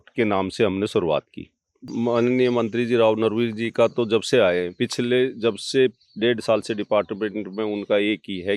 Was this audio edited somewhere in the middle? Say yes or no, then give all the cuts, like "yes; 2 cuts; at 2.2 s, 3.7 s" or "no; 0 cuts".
yes; 1 cut; at 1.9 s